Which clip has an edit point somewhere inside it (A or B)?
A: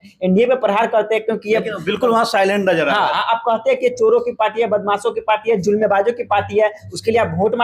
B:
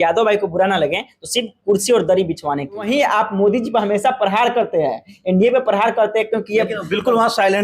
B